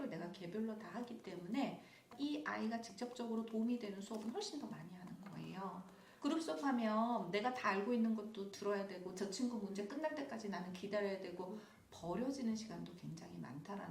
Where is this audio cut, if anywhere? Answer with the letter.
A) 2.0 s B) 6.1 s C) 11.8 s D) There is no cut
B